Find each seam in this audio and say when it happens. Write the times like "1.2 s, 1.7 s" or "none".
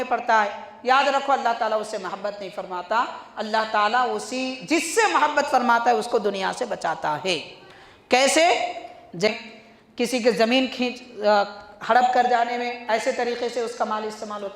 9.3 s